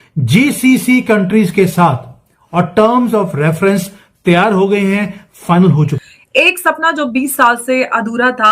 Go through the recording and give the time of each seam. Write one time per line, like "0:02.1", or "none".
0:06.2